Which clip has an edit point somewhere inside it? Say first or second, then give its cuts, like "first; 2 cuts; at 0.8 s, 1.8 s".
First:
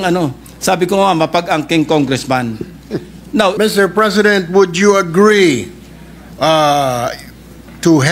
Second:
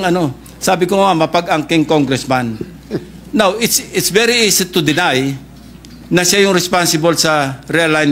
first; 1 cut; at 3.6 s